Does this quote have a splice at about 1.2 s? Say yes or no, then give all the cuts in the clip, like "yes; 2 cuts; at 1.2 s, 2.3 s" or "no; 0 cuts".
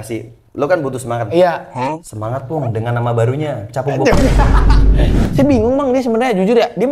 no; 1 cut; at 5.2 s